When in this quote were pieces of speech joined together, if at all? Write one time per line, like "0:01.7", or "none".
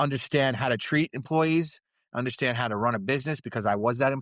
none